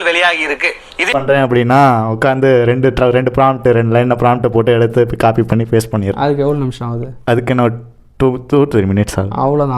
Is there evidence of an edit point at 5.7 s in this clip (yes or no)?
no